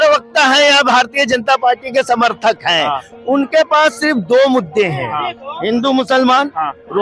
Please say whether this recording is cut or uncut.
uncut